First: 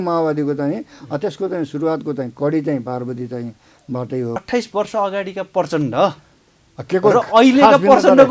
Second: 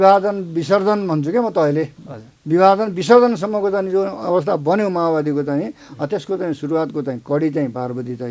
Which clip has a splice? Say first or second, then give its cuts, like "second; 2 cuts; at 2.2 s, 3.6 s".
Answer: first; 1 cut; at 4.4 s